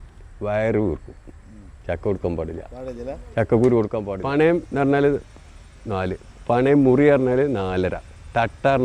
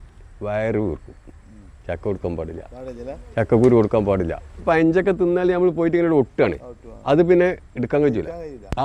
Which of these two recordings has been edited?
first; 1 cut; at 4.1 s

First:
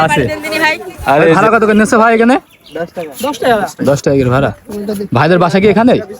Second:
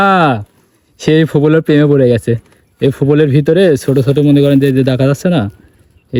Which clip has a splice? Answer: first; 1 cut; at 1.4 s

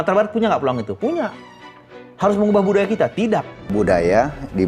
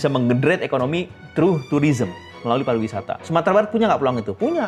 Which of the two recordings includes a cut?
first; 1 cut; at 3.7 s

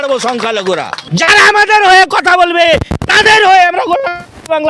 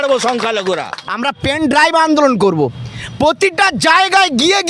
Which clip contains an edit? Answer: second; 1 cut; at 1.0 s

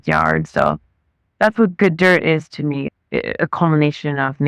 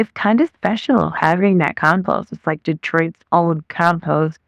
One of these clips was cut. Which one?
first; 1 cut; at 2.9 s

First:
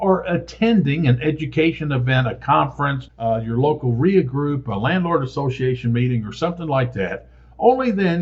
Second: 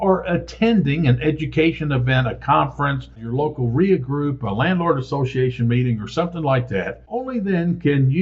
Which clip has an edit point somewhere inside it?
second; 2 cuts; at 3.2 s, 7.3 s

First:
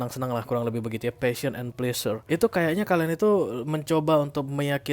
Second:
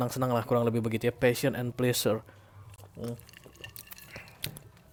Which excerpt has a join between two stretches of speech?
first; 1 cut; at 2.2 s

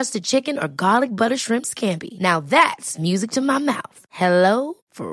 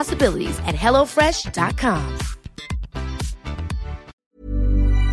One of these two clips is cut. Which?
second; 1 cut; at 4.1 s

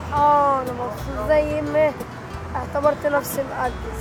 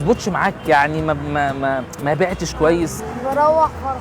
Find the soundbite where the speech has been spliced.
second; 1 cut; at 3.1 s

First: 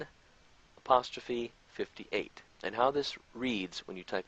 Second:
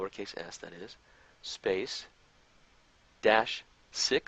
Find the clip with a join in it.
first; 1 cut; at 3.2 s

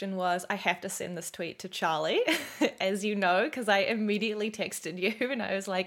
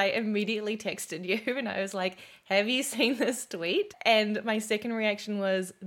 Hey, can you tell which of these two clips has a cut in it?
second; 1 cut; at 3.9 s

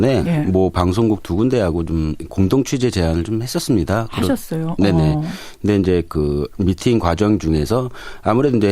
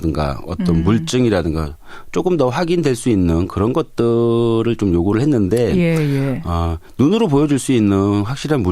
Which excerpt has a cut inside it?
first; 1 cut; at 3.5 s

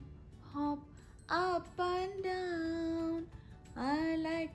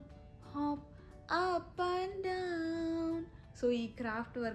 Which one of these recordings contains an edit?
second; 1 cut; at 3.4 s

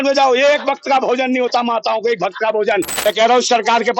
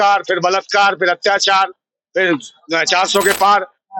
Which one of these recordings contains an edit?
first; 1 cut; at 2.9 s

